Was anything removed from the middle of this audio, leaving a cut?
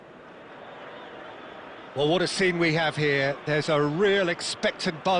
no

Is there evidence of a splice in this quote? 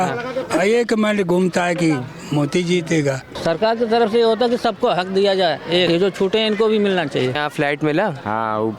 yes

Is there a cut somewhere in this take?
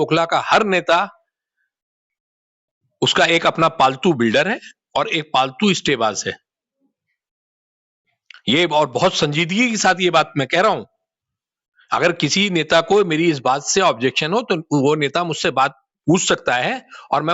no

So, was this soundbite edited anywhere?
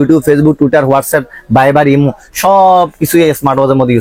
no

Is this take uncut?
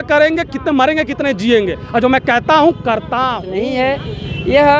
no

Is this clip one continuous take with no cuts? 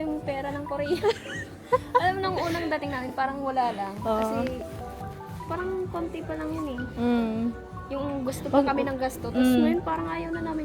yes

